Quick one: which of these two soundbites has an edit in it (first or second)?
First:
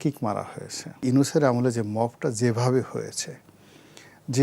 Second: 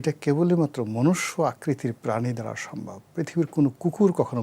first